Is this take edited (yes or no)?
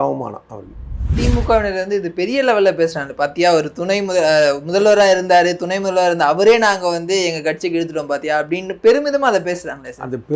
yes